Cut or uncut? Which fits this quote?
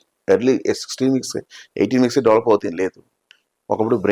uncut